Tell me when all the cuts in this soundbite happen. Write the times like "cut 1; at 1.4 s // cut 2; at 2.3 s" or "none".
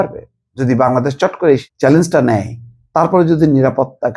cut 1; at 1.7 s